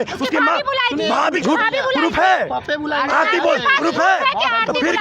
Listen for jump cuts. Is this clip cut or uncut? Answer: cut